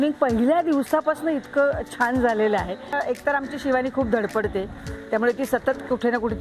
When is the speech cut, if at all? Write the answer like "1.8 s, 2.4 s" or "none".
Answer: 2.9 s